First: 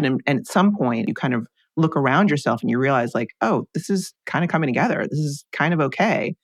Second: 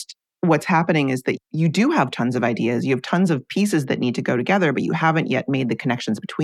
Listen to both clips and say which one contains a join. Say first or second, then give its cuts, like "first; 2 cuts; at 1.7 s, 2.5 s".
first; 2 cuts; at 1.1 s, 4.2 s